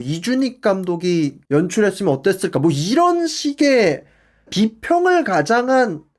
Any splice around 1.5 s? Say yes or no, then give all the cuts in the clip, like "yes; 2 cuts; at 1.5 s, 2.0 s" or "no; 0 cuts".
no; 1 cut; at 4.5 s